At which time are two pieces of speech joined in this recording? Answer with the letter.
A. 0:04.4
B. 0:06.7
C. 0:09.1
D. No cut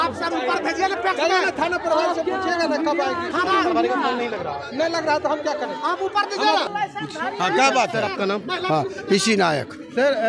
B